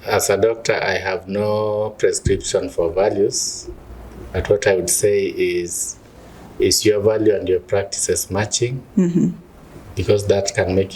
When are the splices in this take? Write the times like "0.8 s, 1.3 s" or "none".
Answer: none